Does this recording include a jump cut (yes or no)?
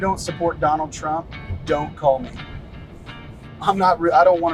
no